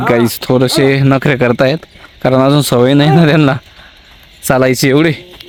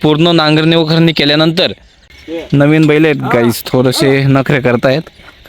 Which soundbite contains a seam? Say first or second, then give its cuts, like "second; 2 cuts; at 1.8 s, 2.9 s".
second; 1 cut; at 2.2 s